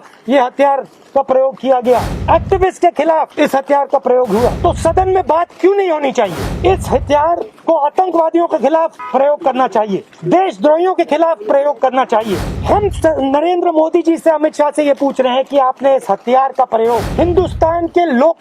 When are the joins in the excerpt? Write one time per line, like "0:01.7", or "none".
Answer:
0:02.1
0:03.3
0:04.6
0:06.5
0:07.5
0:09.0
0:10.1
0:12.5
0:17.1